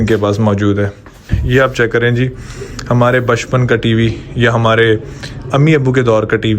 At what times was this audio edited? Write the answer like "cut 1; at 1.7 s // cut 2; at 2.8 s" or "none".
cut 1; at 1.3 s